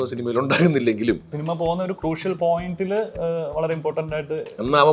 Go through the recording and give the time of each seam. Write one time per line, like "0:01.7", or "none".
0:01.4